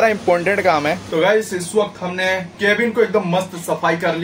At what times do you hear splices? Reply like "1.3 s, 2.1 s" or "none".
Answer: 1.0 s, 2.5 s